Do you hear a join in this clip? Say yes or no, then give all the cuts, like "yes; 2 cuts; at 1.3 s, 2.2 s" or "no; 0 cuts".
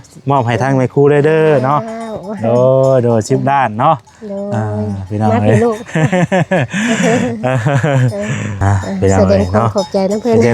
yes; 1 cut; at 8.5 s